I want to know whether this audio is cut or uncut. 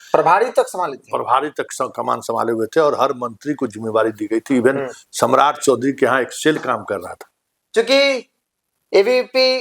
cut